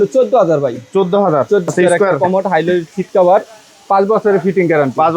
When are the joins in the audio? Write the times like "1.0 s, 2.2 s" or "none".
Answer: 1.7 s